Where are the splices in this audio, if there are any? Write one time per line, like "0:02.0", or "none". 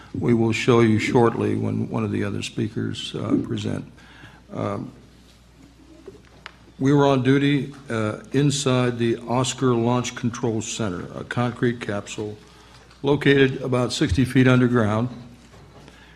0:01.9